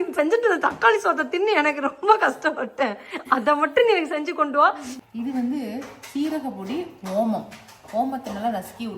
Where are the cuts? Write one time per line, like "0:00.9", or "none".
0:04.9